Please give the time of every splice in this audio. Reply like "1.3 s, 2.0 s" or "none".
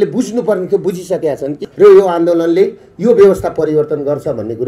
1.6 s